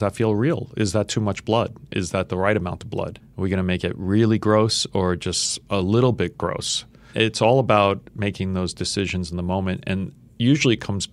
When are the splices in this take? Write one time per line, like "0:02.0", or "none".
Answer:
0:03.2
0:07.1